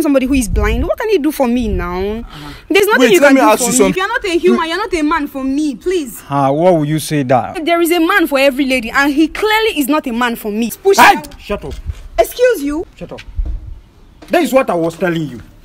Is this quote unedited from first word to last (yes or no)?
no